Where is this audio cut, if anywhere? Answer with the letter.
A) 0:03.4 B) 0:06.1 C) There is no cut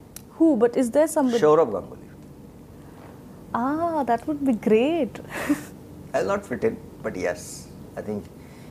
C